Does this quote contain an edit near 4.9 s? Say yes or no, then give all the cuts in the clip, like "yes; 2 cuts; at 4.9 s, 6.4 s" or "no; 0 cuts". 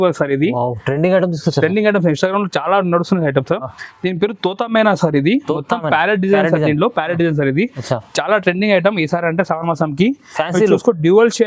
no; 0 cuts